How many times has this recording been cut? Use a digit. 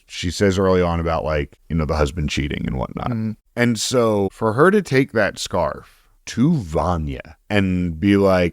3